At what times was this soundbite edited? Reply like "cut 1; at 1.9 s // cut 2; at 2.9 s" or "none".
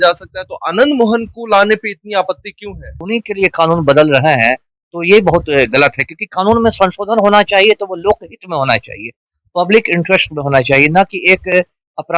cut 1; at 2.9 s

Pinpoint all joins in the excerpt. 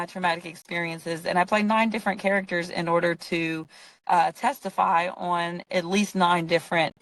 none

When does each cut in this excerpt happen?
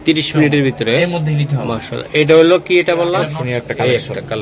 cut 1; at 3.4 s

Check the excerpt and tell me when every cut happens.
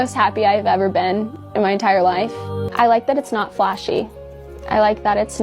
cut 1; at 1.4 s // cut 2; at 2.5 s

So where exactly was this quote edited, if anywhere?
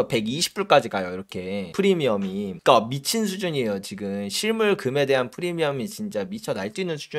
none

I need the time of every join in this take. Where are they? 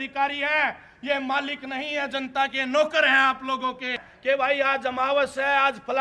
cut 1; at 4.1 s

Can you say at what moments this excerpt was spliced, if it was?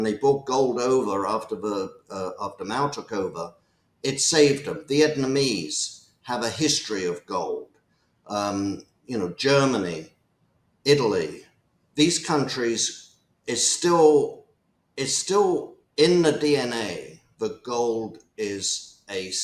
none

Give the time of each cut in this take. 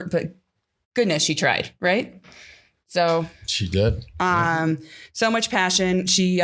none

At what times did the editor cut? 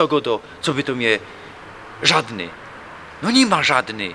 none

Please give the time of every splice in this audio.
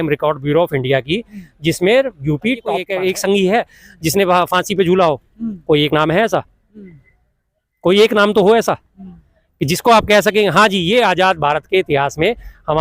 cut 1; at 2.8 s

